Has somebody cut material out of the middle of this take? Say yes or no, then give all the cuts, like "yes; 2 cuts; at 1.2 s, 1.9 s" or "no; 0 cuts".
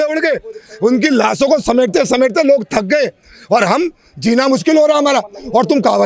no; 0 cuts